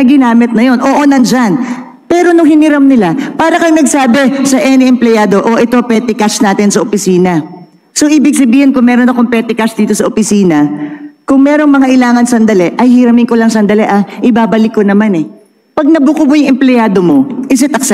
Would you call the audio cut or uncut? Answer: uncut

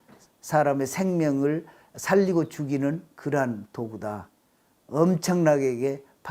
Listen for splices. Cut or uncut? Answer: uncut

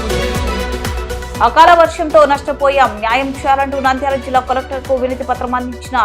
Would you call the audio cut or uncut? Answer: cut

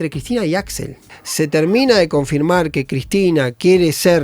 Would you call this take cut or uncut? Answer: cut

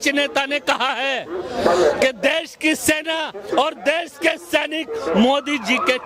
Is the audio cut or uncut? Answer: uncut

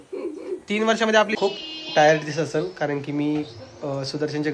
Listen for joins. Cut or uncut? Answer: cut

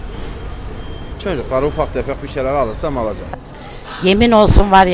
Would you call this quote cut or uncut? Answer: cut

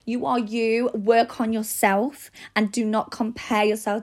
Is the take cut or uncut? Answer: uncut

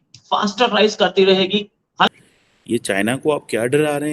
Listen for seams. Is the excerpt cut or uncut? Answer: cut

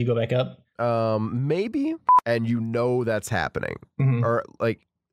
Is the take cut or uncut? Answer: cut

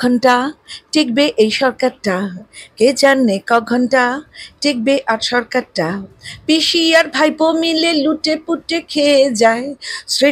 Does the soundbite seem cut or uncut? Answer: uncut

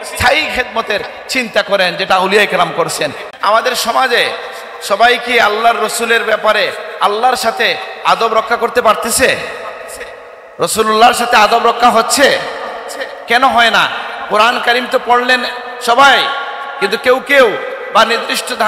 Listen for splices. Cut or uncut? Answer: cut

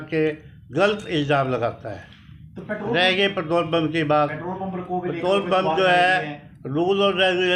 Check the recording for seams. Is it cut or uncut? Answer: uncut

